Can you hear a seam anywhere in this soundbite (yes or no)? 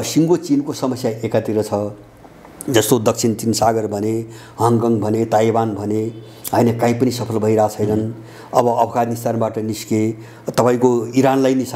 no